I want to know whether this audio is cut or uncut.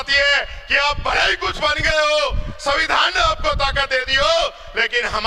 uncut